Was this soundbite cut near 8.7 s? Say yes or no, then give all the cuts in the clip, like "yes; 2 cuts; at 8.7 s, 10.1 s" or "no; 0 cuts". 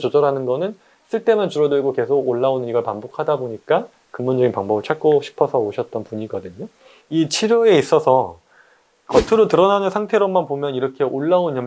no; 1 cut; at 6.9 s